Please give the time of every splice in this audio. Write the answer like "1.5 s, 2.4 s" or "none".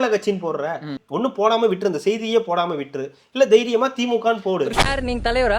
1.0 s, 4.7 s